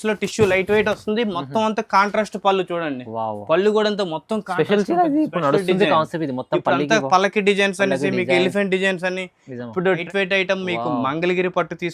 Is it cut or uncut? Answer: cut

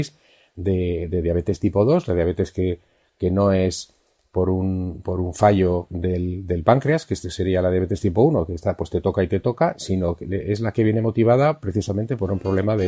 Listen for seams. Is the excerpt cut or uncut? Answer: uncut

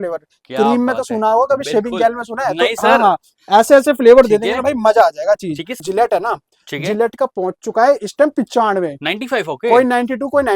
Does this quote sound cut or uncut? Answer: cut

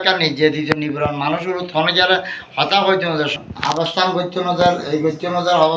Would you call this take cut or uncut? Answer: cut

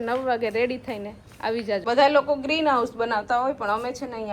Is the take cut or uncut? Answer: cut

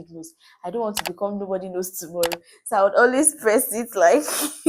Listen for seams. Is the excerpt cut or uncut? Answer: uncut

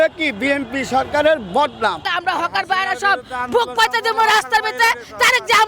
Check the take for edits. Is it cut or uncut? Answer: cut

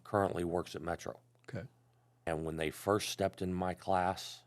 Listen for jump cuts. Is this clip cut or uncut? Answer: cut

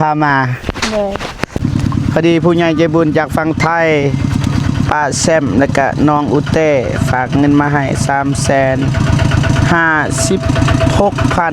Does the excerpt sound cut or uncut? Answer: cut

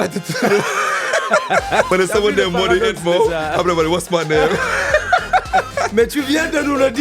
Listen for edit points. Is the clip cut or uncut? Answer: cut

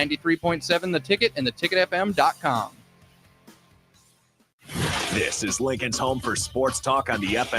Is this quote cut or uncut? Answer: cut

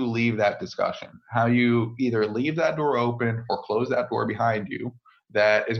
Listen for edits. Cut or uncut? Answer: uncut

